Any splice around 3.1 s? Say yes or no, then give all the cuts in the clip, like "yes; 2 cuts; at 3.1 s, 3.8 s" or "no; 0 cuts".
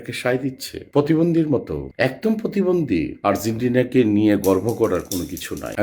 yes; 1 cut; at 3.1 s